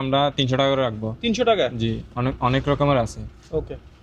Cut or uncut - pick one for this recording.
uncut